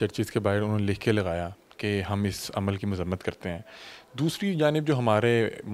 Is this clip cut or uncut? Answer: uncut